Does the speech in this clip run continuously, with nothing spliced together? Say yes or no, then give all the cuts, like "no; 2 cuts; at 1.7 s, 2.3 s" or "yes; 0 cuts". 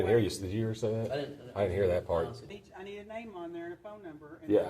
no; 1 cut; at 2.5 s